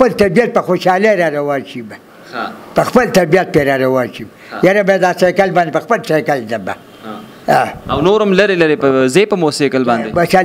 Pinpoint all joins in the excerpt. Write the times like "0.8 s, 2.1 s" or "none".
none